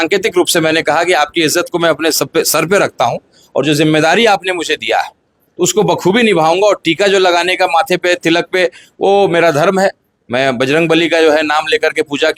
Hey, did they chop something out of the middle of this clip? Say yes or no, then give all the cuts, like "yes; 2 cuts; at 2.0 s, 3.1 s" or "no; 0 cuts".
no; 0 cuts